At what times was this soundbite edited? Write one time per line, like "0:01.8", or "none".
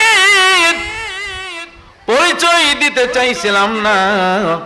none